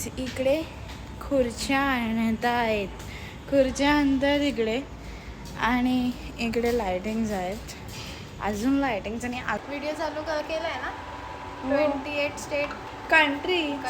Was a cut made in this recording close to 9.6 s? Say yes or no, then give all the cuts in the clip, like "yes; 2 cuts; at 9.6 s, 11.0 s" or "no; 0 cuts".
yes; 1 cut; at 9.6 s